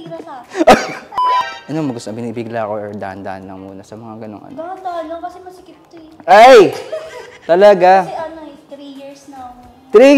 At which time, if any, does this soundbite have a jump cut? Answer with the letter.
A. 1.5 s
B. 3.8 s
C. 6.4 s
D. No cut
A